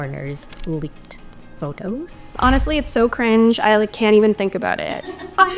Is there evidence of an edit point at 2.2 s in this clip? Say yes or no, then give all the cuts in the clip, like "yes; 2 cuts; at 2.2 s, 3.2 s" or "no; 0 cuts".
no; 0 cuts